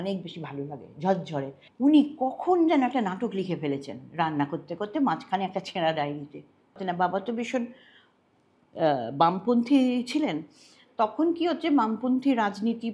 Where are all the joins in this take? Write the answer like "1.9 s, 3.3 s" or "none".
1.6 s, 6.8 s